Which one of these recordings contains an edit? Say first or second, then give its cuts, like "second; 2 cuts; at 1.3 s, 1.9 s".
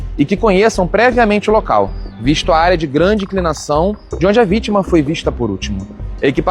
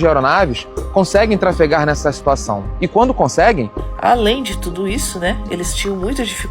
second; 1 cut; at 3.8 s